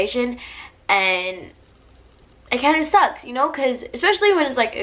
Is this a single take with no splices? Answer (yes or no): yes